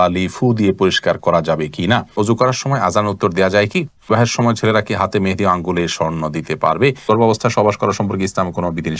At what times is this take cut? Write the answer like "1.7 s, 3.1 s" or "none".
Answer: 2.1 s, 4.1 s, 7.1 s